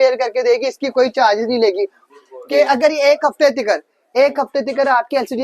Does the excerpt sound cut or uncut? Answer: cut